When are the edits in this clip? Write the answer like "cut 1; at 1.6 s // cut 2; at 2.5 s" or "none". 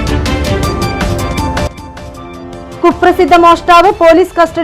cut 1; at 1.6 s